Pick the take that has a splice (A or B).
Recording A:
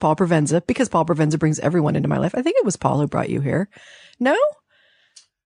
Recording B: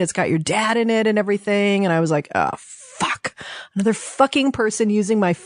A